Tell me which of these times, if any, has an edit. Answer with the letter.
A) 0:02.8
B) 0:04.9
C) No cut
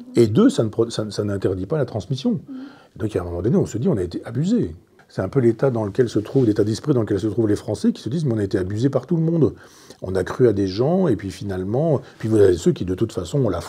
B